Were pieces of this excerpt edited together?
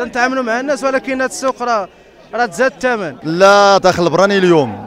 yes; 1 cut; at 3.2 s

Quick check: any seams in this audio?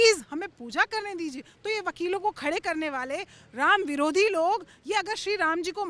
no; 0 cuts

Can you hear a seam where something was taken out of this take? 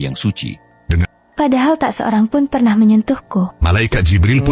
yes; 1 cut; at 1.1 s

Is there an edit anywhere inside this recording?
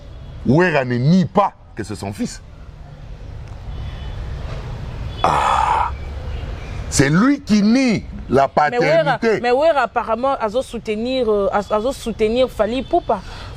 no; 0 cuts

